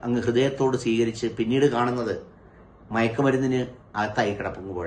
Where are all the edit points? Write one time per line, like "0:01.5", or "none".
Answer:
0:03.8